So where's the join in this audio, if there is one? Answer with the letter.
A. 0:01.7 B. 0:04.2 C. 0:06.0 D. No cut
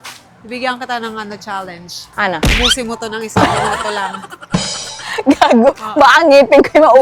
D